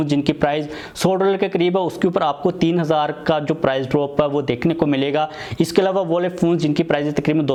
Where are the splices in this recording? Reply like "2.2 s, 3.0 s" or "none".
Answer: none